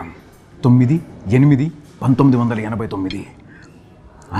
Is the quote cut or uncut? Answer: uncut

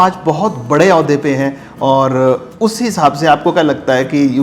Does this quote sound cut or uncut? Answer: uncut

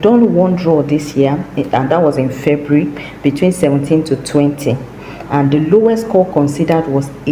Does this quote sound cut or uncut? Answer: uncut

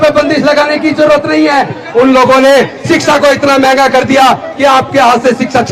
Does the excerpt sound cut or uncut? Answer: uncut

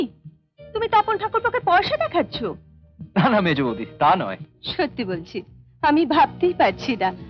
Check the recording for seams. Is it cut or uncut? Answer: uncut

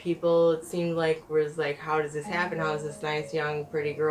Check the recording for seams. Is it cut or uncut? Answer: uncut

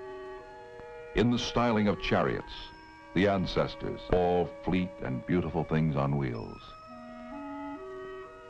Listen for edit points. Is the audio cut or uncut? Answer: cut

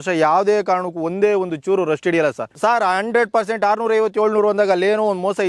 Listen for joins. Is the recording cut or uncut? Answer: cut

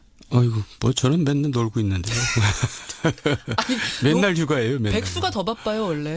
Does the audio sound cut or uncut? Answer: cut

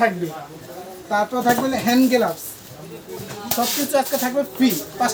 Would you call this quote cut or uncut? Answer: uncut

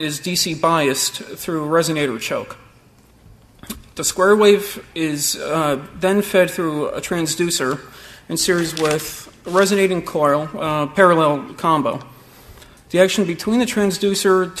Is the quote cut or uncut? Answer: uncut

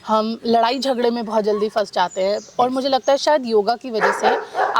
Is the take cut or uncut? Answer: uncut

